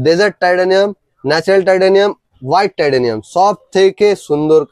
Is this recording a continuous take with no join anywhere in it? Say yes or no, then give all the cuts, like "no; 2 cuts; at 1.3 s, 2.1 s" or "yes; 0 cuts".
yes; 0 cuts